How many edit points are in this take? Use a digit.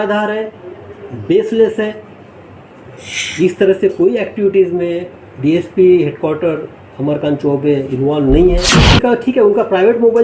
1